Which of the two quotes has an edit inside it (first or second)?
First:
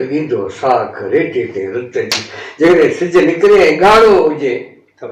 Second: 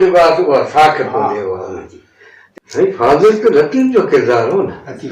second